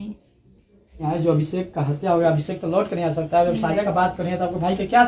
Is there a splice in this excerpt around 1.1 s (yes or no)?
yes